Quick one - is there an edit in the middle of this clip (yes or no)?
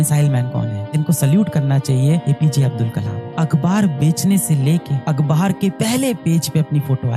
yes